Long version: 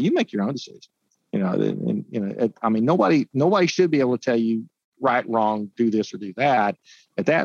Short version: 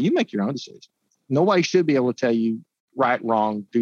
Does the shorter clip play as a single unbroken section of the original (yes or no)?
no